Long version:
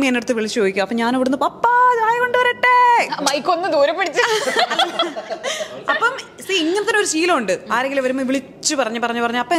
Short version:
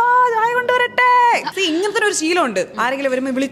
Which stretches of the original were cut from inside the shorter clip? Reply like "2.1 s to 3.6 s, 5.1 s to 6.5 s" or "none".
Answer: 3.1 s to 6.4 s

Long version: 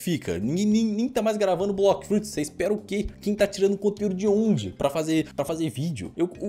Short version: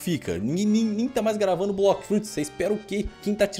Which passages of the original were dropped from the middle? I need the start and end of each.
none

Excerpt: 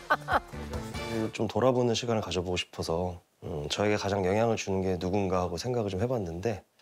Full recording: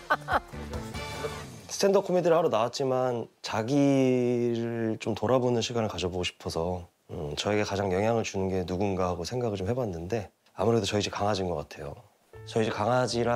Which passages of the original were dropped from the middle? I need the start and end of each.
1.1 s to 4.8 s

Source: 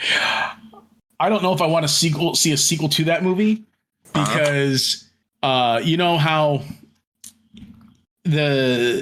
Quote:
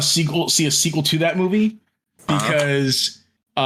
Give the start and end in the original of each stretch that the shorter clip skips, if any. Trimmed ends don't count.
none

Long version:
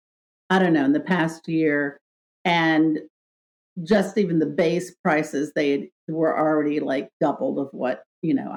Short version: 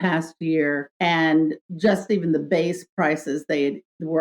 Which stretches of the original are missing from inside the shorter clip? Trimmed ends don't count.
1.9 s to 2.3 s, 3.1 s to 3.7 s

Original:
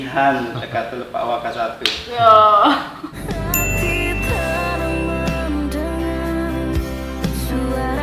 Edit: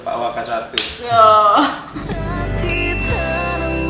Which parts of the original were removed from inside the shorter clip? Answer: 3.0 s to 3.1 s

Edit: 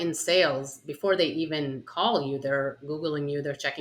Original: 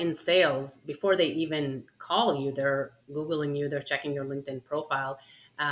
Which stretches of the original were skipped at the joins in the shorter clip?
1.8 s to 2.0 s, 2.9 s to 3.1 s

